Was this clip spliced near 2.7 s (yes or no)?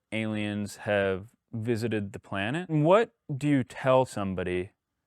yes